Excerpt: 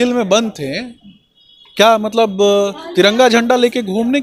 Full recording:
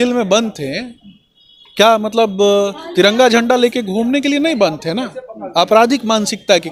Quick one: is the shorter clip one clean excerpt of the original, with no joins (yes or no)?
yes